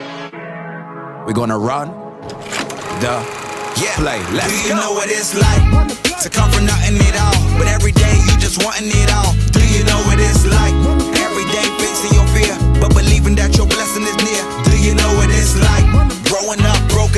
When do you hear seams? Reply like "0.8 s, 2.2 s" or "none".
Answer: none